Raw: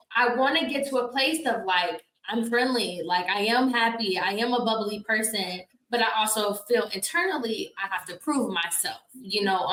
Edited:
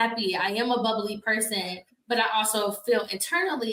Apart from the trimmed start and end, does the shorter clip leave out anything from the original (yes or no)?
no